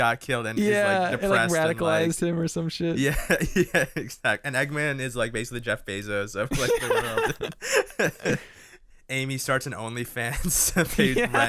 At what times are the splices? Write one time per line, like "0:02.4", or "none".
0:09.2